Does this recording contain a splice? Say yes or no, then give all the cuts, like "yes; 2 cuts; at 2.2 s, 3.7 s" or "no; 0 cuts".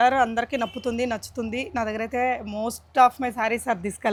no; 0 cuts